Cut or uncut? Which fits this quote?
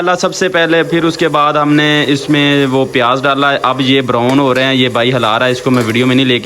uncut